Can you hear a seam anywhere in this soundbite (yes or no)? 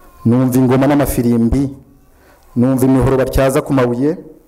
no